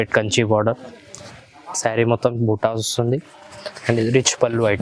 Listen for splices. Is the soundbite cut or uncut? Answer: uncut